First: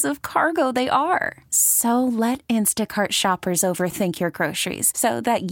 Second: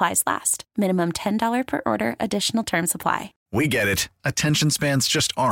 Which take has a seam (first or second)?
second